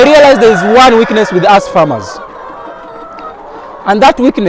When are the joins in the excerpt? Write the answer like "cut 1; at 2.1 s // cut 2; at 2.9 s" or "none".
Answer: none